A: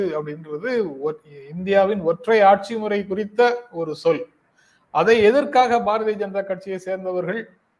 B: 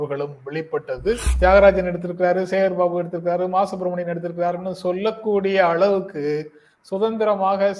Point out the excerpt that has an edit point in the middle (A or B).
B